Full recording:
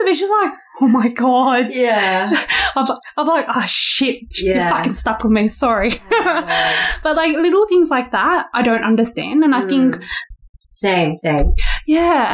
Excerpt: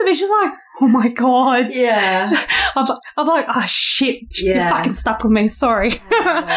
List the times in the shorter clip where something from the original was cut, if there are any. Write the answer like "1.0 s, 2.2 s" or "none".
none